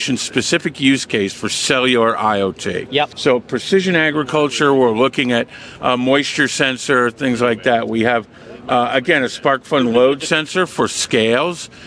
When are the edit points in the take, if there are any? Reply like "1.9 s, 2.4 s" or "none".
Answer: 3.1 s